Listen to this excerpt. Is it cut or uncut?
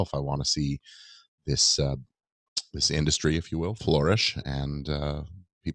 uncut